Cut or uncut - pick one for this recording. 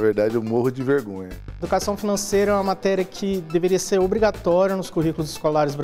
cut